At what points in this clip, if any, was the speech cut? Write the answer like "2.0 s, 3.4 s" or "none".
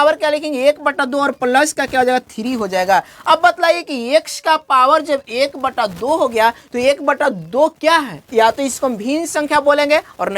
8.2 s